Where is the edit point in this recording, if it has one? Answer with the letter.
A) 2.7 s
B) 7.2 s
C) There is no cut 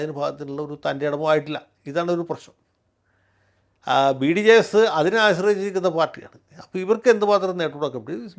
C